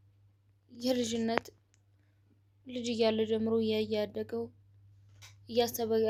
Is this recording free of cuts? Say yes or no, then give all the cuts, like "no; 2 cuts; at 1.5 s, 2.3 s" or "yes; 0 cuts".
yes; 0 cuts